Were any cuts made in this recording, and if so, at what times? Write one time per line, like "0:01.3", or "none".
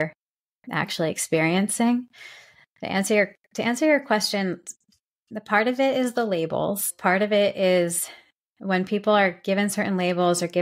0:06.9